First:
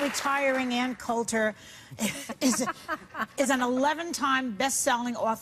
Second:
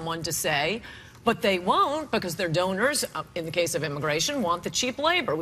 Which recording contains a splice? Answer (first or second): second